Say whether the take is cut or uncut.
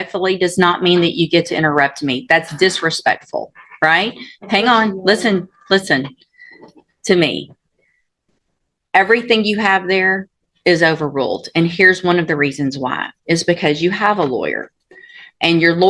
uncut